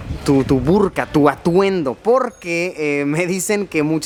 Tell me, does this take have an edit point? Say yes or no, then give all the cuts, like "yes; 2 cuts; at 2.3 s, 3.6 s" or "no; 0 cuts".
no; 0 cuts